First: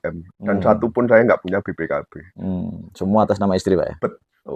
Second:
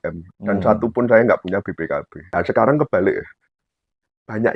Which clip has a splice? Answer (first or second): second